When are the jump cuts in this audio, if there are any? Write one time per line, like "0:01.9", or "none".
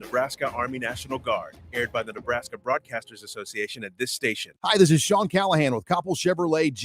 0:04.5

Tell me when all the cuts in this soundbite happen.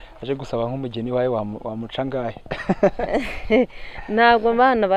none

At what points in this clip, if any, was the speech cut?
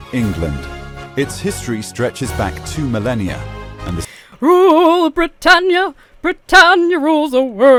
none

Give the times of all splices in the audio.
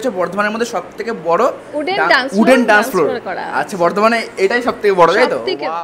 none

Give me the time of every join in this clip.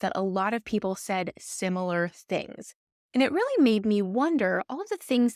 none

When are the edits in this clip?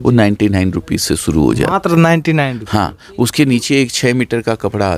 none

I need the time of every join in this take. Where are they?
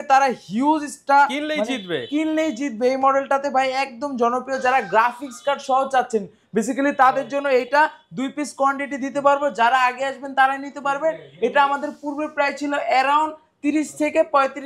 none

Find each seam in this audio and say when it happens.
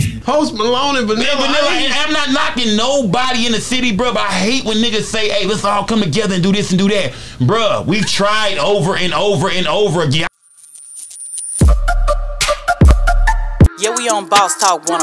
0:10.3

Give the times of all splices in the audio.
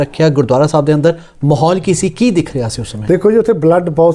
none

